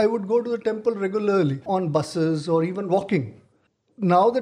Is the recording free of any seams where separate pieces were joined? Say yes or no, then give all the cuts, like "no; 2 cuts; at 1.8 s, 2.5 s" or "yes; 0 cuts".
no; 1 cut; at 1.6 s